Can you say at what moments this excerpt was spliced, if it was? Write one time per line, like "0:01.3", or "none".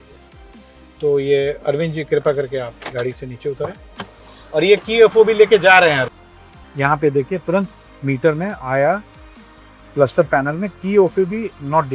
0:06.1